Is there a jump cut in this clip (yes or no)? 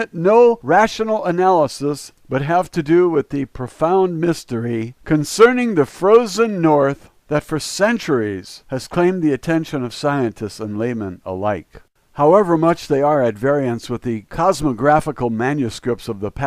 yes